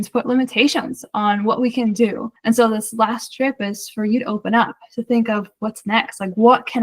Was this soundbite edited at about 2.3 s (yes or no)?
yes